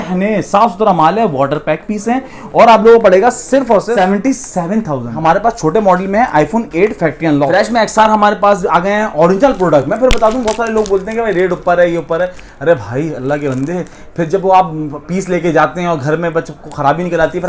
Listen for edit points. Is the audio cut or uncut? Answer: cut